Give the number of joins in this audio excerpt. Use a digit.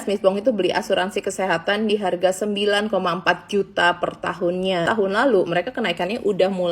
1